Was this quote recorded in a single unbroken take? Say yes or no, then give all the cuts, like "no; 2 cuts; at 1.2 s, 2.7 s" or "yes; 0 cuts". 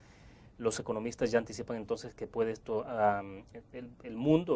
no; 1 cut; at 2.9 s